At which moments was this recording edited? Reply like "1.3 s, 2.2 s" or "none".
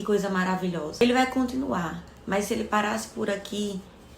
1.0 s